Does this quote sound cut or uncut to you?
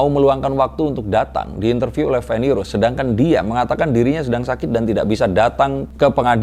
uncut